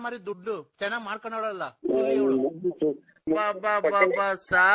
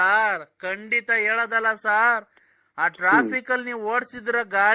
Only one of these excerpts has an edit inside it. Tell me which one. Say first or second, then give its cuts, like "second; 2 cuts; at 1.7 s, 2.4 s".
first; 1 cut; at 3.2 s